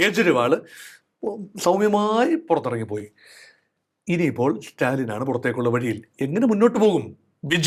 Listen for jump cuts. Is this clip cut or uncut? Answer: uncut